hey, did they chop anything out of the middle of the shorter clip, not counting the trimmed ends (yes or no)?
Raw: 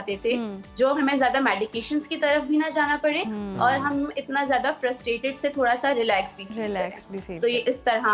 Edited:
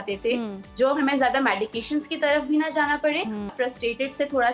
yes